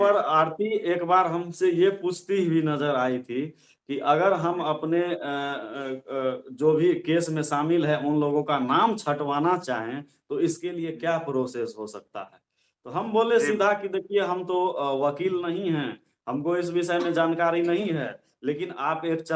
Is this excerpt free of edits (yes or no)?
yes